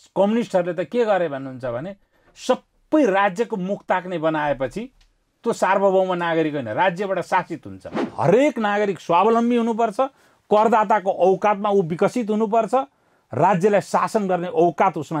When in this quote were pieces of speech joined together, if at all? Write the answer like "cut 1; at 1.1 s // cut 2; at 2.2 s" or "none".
cut 1; at 8.1 s